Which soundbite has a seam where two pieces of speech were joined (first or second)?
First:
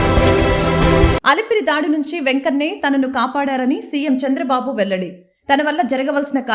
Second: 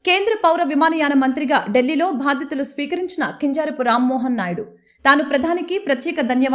first